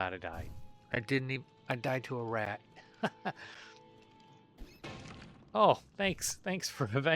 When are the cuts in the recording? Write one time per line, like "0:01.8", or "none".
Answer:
none